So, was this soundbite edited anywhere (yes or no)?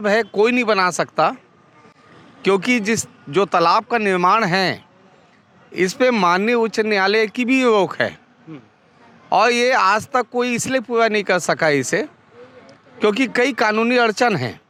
no